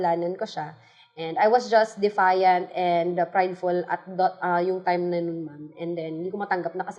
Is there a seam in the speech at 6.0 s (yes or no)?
no